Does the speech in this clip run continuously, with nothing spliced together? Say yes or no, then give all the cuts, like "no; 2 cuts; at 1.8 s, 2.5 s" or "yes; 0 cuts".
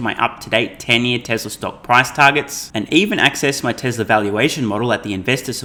yes; 0 cuts